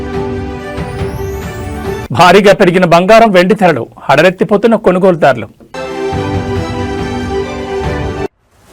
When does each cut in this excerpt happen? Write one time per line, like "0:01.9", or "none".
none